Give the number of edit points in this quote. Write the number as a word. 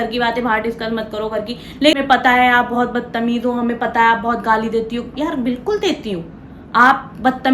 one